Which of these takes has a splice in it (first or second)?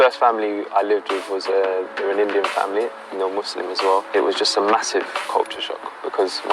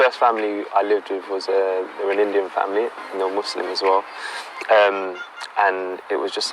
first